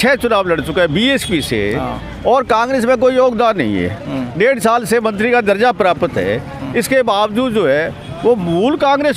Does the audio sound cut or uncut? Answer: uncut